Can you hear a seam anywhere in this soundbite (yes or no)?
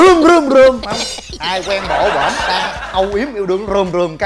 yes